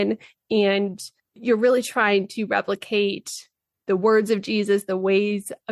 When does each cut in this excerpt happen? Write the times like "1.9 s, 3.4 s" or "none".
1.4 s